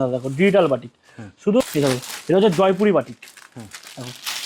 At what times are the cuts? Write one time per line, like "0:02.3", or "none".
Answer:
0:01.6